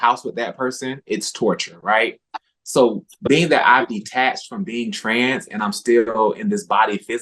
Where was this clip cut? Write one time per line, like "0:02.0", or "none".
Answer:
none

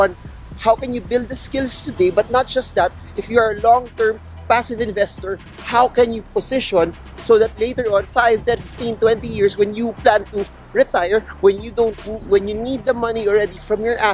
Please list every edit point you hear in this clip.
none

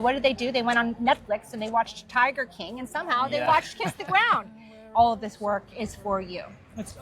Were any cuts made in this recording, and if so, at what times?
0:04.8

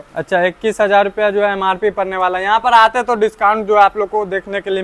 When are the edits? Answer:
none

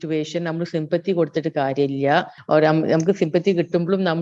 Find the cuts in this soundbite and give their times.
0:02.4

